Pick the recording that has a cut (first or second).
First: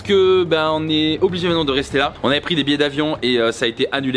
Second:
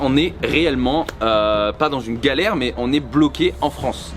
first